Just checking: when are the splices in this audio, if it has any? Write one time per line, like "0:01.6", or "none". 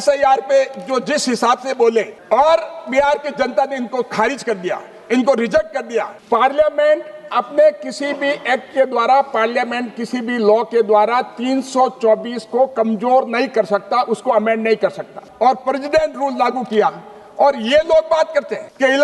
0:06.2
0:15.3